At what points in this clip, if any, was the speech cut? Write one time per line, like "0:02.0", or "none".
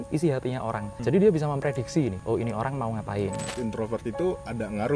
0:00.9
0:02.2
0:03.5